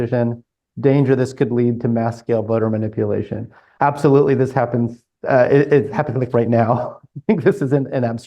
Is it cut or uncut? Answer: uncut